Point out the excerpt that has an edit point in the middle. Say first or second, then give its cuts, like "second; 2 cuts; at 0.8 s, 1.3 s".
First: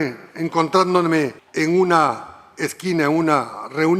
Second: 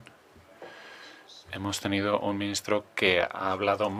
first; 1 cut; at 1.4 s